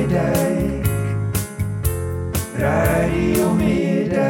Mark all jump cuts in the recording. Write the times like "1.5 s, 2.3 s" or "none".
none